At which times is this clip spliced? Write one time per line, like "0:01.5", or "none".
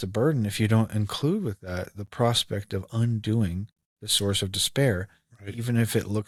none